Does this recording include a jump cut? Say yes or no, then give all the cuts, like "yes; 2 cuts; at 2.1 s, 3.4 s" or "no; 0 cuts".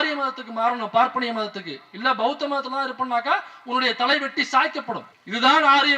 no; 0 cuts